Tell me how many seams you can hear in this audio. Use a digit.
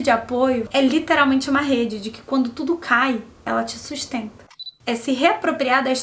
1